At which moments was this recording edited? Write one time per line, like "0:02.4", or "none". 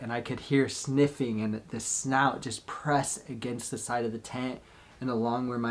none

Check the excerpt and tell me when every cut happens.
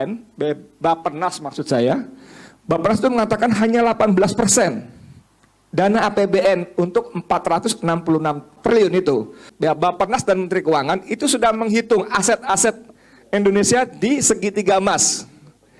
0:08.6
0:09.4

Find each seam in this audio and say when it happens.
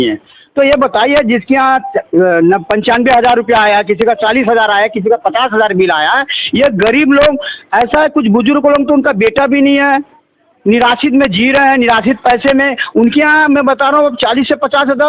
none

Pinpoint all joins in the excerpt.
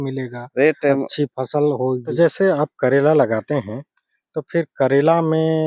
0:02.1

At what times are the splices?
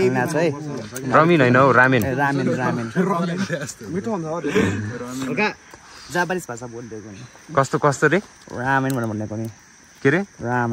none

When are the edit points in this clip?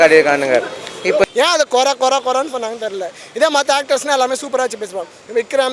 0:01.2

